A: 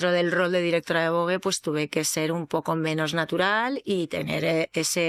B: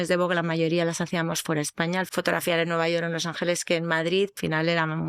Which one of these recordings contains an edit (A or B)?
B